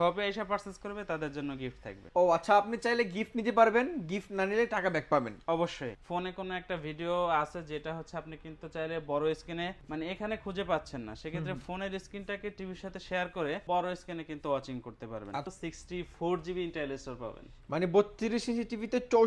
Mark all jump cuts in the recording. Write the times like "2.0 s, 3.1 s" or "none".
1.9 s, 5.9 s, 9.8 s, 13.6 s, 15.5 s